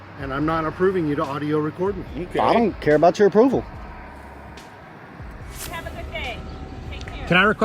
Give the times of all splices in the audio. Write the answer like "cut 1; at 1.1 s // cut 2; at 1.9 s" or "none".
cut 1; at 5.7 s